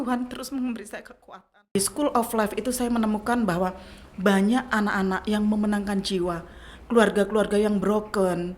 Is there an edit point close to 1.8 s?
yes; 1 cut; at 1.8 s

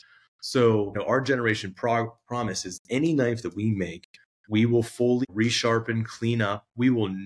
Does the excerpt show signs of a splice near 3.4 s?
no; 2 cuts; at 1.0 s, 5.2 s

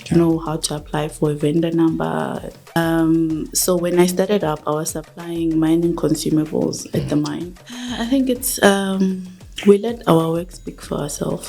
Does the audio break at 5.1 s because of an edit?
no; 2 cuts; at 2.8 s, 7.9 s

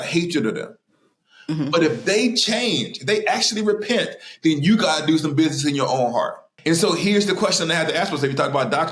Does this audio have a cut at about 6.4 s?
yes; 1 cut; at 6.4 s

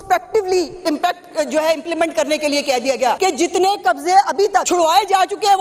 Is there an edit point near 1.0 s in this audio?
no; 2 cuts; at 3.2 s, 4.7 s

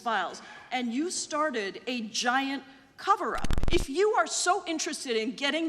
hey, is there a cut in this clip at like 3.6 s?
yes; 1 cut; at 3.6 s

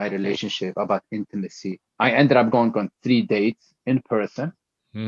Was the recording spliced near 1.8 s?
yes; 1 cut; at 1.8 s

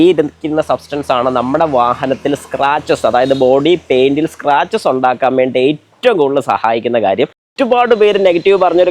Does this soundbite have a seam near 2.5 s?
no; 1 cut; at 7.5 s

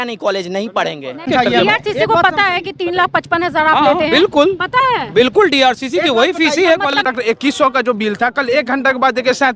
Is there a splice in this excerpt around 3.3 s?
no; 2 cuts; at 1.3 s, 7.0 s

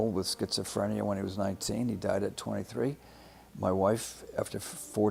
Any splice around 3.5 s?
no; 0 cuts

